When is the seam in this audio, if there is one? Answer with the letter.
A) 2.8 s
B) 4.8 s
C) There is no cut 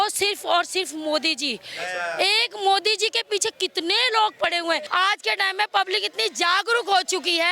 B